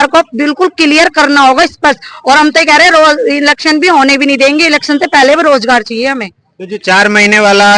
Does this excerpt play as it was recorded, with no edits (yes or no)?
yes